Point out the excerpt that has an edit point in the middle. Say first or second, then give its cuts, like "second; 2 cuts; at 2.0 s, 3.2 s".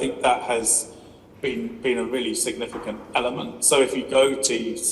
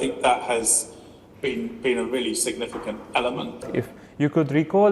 second; 1 cut; at 3.6 s